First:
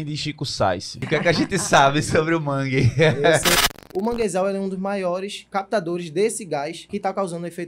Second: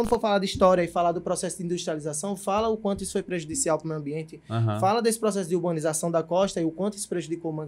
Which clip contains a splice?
first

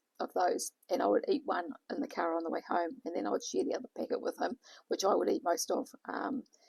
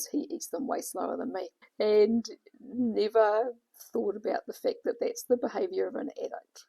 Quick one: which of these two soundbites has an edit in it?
second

